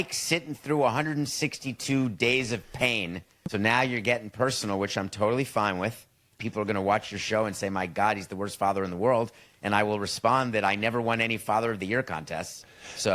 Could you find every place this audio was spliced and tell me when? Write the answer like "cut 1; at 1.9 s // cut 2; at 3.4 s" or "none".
cut 1; at 3.5 s // cut 2; at 6.4 s